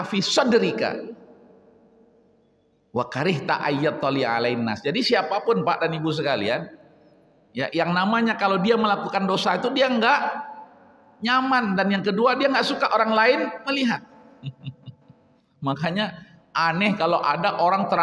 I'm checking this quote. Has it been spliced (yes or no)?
no